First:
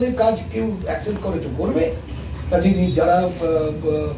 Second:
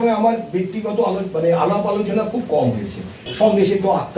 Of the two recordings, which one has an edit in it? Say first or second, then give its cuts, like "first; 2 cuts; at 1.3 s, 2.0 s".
second; 1 cut; at 3.3 s